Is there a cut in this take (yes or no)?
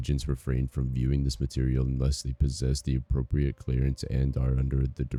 no